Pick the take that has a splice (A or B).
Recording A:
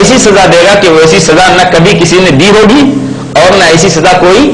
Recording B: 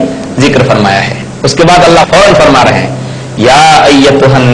B